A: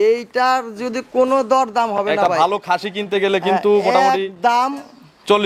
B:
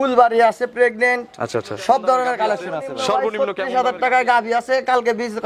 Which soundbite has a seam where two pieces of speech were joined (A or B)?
B